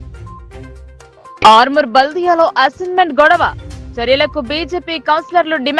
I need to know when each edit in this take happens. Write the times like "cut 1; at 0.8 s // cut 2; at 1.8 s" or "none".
cut 1; at 1.0 s